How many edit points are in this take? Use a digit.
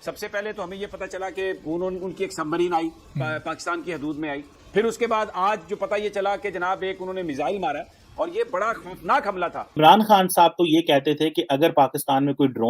1